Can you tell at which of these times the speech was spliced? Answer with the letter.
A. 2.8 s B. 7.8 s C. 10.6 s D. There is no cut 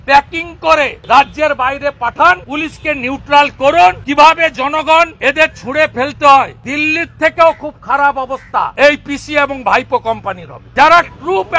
C